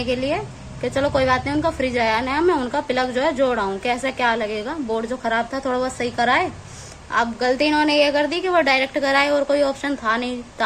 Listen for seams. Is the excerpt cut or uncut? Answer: uncut